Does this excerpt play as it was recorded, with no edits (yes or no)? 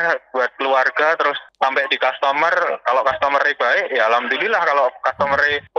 yes